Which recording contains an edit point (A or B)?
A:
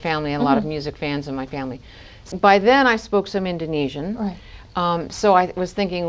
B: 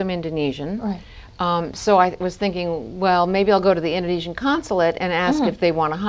A